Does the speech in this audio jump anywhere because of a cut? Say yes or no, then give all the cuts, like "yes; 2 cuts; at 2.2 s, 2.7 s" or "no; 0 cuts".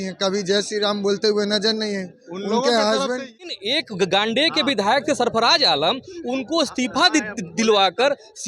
yes; 1 cut; at 3.5 s